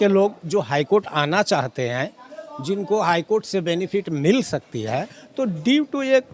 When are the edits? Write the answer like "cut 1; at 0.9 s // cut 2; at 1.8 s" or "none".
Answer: none